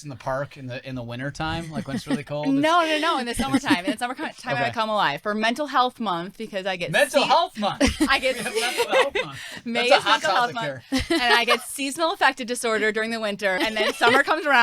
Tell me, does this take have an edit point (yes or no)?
yes